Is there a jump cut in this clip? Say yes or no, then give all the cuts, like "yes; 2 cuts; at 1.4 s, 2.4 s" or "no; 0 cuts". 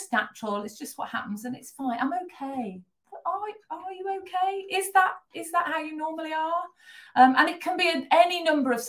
no; 0 cuts